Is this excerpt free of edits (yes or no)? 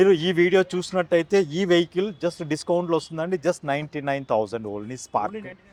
yes